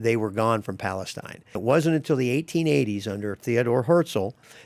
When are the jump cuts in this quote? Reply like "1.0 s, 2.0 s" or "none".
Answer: 1.6 s